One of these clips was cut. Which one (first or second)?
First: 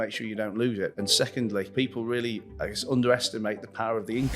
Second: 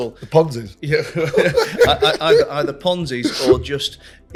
first